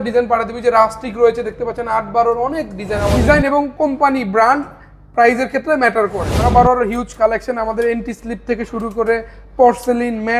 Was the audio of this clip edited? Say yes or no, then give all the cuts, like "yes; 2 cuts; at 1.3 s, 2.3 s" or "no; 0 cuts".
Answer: yes; 2 cuts; at 3.2 s, 6.4 s